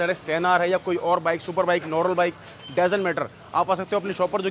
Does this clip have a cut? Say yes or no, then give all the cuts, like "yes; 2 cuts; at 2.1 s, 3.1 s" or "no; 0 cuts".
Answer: no; 0 cuts